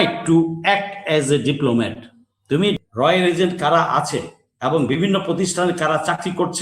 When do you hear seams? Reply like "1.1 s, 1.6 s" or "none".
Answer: 2.8 s